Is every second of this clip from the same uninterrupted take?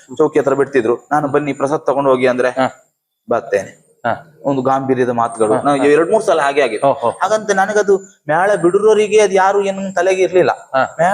yes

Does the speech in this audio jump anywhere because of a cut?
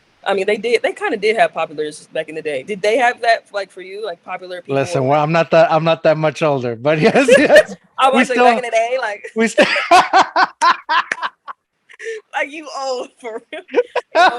no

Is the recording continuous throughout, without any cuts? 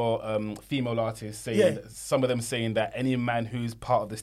yes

